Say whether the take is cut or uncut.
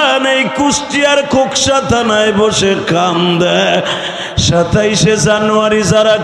uncut